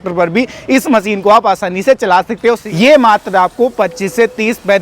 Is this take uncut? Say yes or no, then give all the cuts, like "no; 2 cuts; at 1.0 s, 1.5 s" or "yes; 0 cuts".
no; 1 cut; at 2.7 s